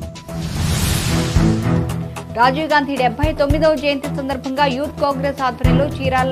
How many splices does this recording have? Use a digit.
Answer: 1